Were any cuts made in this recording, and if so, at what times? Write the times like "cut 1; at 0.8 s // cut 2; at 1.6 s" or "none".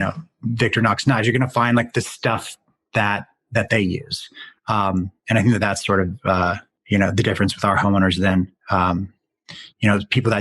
none